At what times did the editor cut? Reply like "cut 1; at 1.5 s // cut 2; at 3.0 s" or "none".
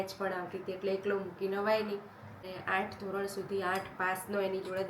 cut 1; at 2.5 s